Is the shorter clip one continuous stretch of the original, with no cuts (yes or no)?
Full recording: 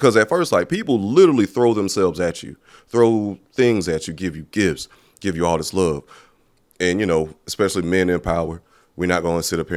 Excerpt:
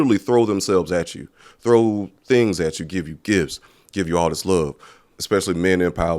no